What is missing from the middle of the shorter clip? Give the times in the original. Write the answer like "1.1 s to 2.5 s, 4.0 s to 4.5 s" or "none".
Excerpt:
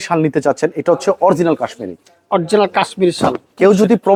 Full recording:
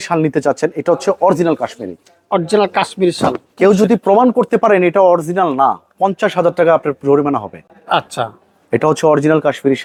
none

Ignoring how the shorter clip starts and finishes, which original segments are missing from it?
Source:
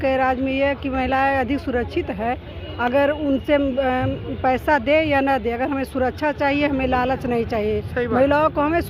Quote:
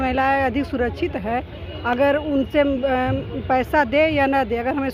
none

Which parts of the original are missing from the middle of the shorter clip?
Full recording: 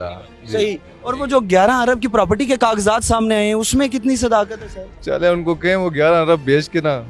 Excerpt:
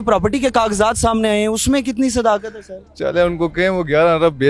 none

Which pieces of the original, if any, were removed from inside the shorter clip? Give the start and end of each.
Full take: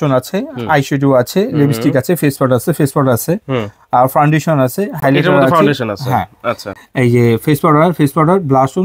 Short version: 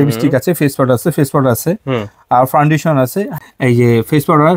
4.9 s to 6.7 s

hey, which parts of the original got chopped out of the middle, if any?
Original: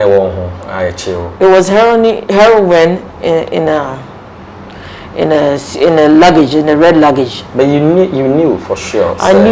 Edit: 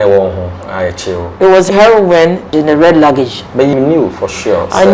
1.7 s to 2.3 s, 3.1 s to 6.5 s, 7.7 s to 8.2 s

